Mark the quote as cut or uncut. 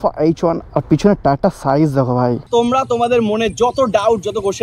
cut